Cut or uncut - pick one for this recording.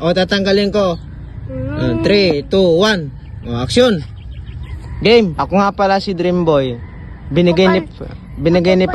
cut